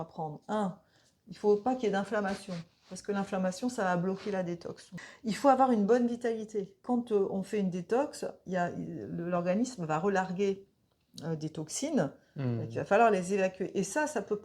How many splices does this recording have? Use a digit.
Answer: 2